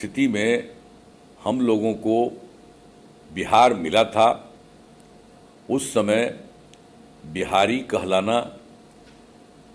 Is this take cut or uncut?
uncut